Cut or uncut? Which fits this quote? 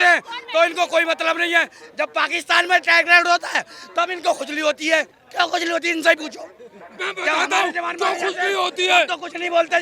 uncut